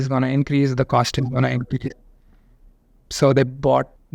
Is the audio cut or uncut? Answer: uncut